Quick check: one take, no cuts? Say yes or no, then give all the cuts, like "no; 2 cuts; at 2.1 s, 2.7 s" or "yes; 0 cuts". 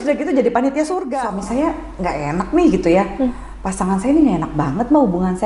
no; 1 cut; at 1.0 s